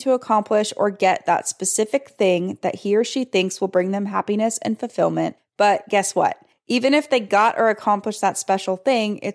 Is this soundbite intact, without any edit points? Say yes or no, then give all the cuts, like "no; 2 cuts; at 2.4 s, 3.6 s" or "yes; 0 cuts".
no; 2 cuts; at 5.4 s, 6.5 s